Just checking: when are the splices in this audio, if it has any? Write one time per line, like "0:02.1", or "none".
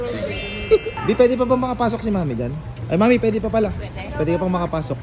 0:01.0
0:02.7